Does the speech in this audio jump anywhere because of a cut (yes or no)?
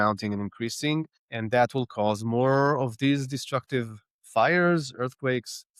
no